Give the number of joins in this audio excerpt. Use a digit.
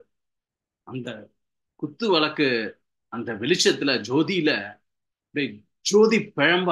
0